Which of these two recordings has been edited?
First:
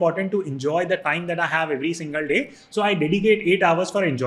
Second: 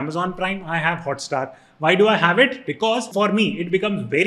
second; 1 cut; at 3.1 s

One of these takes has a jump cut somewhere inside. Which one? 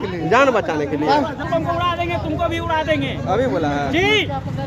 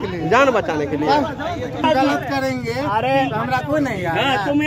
first; 1 cut; at 1.5 s

